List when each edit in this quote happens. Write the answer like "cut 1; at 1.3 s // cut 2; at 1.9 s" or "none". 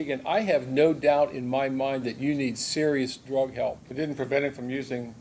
cut 1; at 3.8 s

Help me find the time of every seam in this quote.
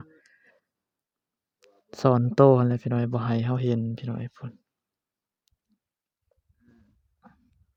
none

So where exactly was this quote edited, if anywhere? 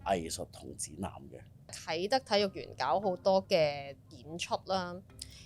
cut 1; at 1.8 s

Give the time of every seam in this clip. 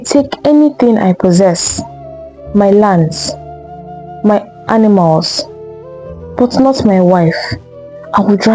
none

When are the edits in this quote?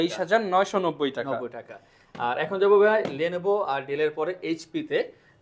none

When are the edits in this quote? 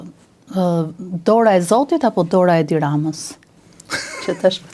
none

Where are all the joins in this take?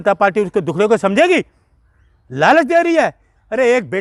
none

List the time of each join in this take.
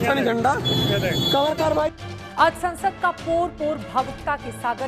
cut 1; at 2.0 s

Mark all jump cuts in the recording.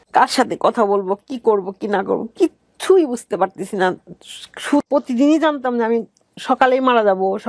cut 1; at 4.8 s

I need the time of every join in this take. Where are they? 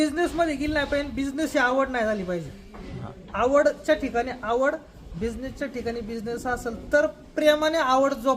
none

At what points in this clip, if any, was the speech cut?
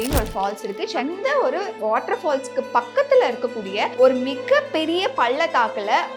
cut 1; at 1.0 s // cut 2; at 3.9 s

